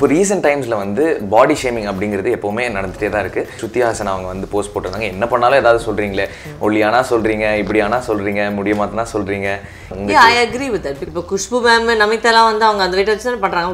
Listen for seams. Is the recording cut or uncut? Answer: cut